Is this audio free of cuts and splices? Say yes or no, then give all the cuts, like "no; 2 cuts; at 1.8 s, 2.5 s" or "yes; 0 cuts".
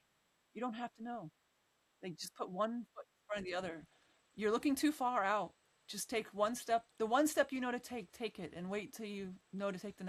yes; 0 cuts